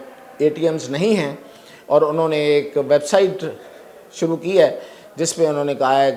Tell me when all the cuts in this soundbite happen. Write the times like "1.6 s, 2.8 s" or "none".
none